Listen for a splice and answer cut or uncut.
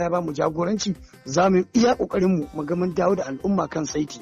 uncut